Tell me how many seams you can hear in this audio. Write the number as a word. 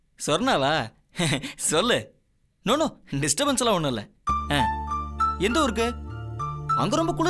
zero